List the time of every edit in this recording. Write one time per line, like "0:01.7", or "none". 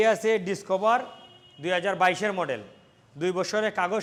none